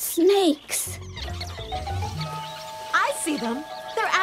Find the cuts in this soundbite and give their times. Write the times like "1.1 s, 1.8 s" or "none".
1.2 s

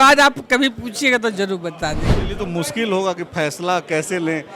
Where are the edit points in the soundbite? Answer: 2.1 s

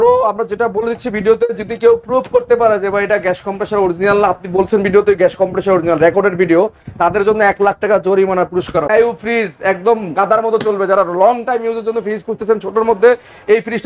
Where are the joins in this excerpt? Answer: 8.9 s

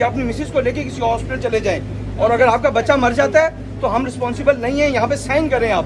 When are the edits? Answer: none

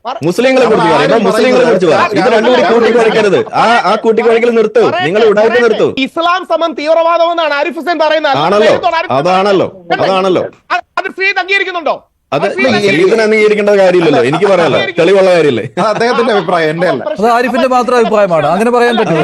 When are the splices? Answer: 6.0 s

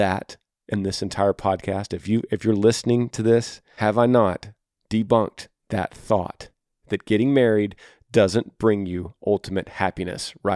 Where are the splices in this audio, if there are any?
3.6 s

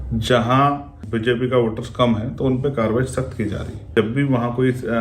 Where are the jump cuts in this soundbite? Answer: 0.9 s, 3.9 s

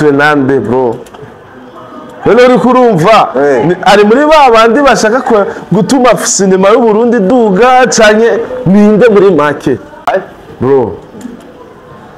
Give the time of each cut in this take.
10.1 s

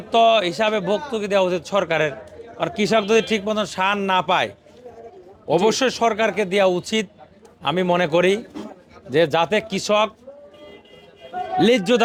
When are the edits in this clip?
none

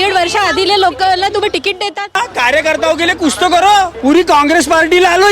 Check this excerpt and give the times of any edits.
2.2 s, 3.9 s

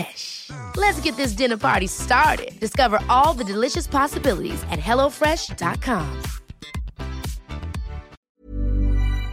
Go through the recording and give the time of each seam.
8.1 s

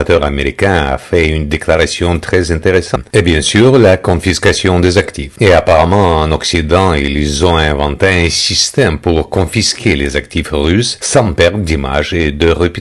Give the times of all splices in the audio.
2.9 s

